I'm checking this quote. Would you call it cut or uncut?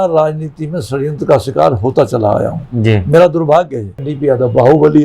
cut